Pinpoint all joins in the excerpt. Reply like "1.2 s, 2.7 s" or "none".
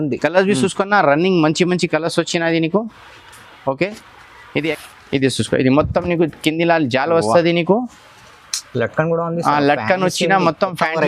4.7 s